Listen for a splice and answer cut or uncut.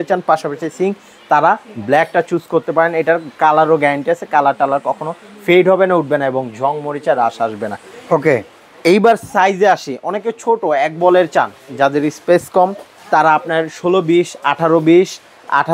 uncut